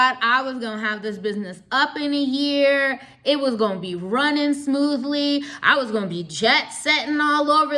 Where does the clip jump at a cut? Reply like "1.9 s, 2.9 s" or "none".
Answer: none